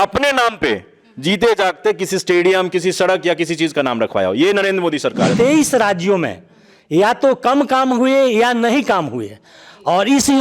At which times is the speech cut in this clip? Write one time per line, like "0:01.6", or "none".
0:05.3